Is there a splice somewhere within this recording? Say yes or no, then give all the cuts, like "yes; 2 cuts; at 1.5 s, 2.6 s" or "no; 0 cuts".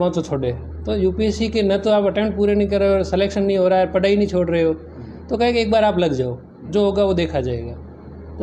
no; 0 cuts